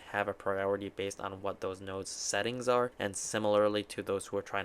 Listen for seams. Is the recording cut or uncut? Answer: cut